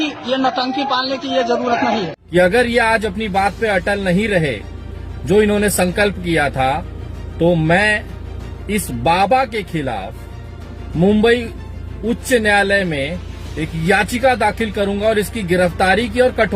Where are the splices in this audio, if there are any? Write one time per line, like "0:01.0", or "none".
0:02.2

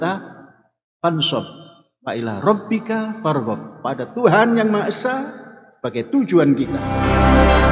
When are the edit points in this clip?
0:06.8

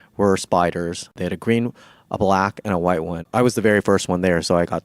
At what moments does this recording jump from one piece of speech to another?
0:01.2
0:03.2

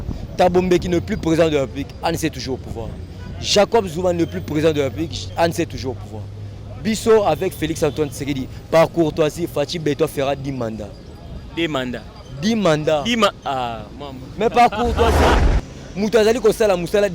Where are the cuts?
0:15.4

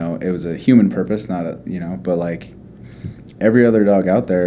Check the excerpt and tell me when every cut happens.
none

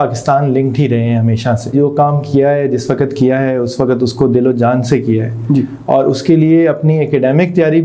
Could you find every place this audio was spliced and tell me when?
0:01.7

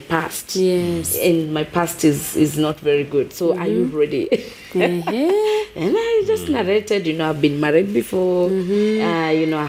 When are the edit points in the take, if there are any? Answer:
none

